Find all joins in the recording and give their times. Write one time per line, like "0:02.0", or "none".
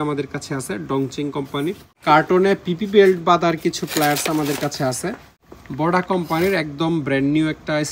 0:01.9
0:05.3